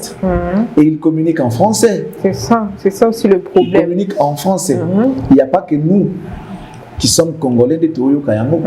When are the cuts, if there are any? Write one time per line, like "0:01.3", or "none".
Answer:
none